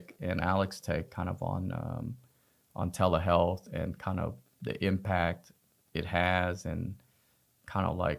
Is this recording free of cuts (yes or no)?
yes